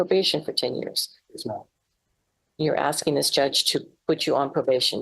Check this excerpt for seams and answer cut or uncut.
uncut